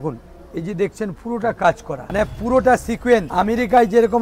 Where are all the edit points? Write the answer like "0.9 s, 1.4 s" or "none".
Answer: 2.0 s, 3.3 s